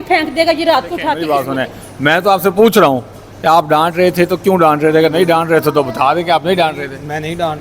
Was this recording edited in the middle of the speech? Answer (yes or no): yes